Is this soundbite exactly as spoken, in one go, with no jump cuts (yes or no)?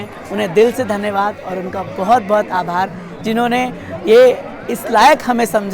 yes